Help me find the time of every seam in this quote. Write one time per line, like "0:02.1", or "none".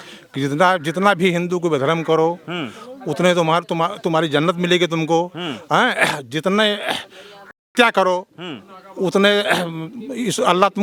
none